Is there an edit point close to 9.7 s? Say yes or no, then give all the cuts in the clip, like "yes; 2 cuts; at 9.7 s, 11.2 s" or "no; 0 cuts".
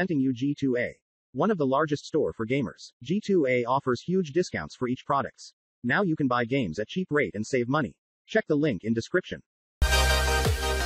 yes; 1 cut; at 9.7 s